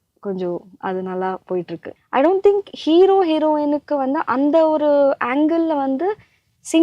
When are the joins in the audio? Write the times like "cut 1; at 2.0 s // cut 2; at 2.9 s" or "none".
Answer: cut 1; at 1.8 s